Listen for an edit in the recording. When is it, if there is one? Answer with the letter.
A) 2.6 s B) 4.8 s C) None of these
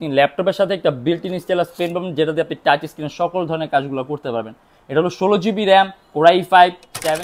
C